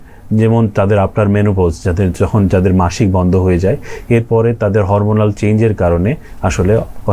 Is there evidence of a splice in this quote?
no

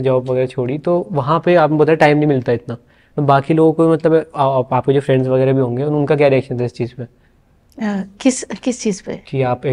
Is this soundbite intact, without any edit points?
yes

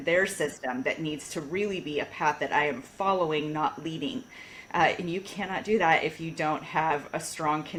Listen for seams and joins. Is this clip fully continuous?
yes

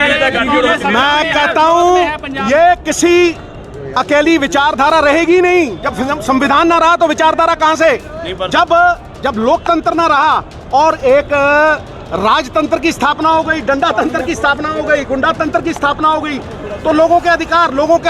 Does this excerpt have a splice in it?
no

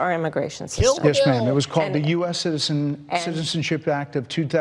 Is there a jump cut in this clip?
yes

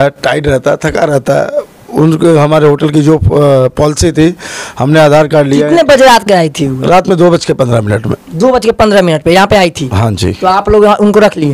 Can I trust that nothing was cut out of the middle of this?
yes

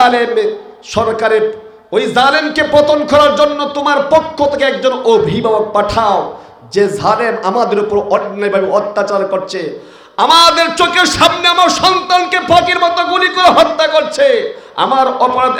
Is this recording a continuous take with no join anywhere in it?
yes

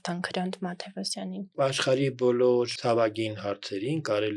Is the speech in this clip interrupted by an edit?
yes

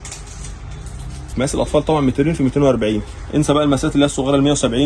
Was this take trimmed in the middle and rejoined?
yes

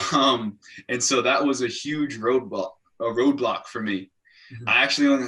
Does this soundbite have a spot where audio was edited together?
no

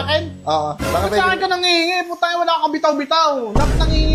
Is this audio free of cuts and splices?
yes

